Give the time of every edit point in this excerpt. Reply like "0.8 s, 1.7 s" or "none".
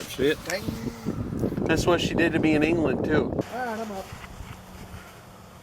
3.4 s